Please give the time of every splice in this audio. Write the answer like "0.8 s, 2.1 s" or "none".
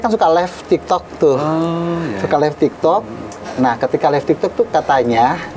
none